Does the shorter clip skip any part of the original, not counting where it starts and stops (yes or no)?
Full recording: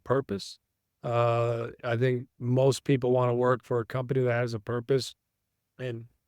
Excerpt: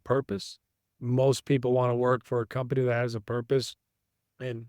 yes